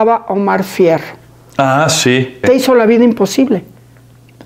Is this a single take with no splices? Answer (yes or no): no